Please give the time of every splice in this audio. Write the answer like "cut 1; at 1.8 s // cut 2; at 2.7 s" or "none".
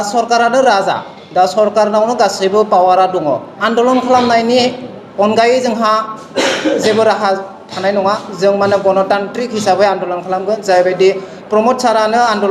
cut 1; at 3.6 s